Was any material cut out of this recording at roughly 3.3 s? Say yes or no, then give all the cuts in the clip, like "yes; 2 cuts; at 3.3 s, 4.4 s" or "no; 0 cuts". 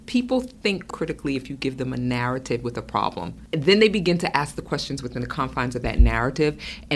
yes; 2 cuts; at 0.9 s, 3.3 s